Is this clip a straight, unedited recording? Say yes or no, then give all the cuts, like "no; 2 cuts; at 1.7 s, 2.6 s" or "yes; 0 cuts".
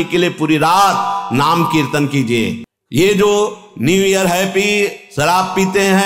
no; 1 cut; at 2.8 s